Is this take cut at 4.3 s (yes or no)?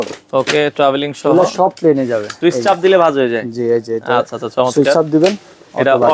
no